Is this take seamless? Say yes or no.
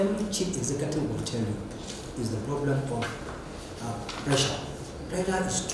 yes